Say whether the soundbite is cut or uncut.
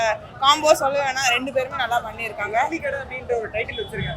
uncut